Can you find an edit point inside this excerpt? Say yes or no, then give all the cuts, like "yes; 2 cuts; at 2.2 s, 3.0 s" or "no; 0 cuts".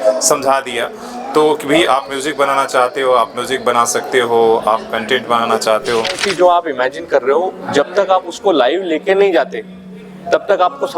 yes; 1 cut; at 6.2 s